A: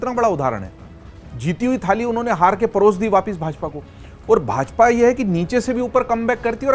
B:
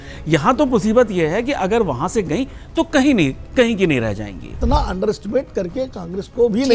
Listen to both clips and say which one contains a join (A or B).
B